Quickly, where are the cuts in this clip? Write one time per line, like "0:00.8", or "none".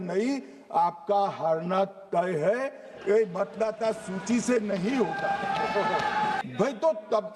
0:06.4